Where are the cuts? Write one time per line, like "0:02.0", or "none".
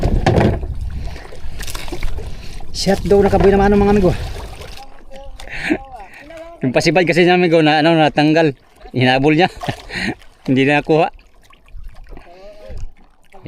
0:04.7